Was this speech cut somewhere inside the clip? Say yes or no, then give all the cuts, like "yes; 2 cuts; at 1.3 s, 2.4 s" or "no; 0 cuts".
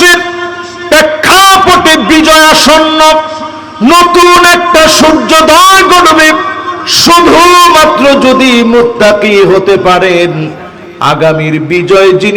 no; 0 cuts